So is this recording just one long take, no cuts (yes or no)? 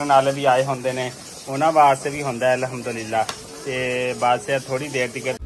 yes